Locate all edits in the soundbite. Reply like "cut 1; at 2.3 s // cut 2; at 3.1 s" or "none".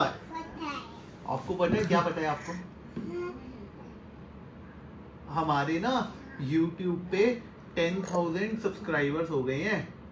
none